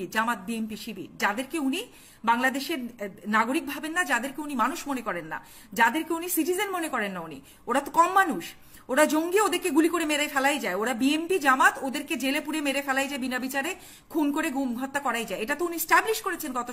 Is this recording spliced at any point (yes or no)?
no